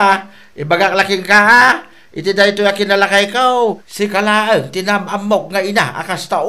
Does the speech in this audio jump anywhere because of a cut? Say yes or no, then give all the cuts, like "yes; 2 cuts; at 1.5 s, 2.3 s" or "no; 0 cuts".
yes; 1 cut; at 3.9 s